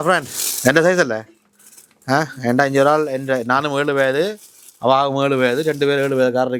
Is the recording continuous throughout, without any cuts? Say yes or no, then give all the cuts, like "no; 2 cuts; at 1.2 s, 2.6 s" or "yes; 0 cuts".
yes; 0 cuts